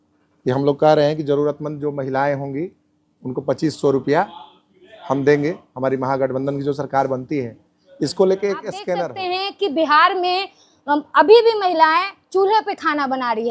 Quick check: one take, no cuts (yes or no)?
no